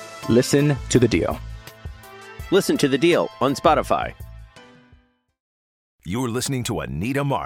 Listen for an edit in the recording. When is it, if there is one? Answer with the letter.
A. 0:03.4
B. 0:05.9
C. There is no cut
B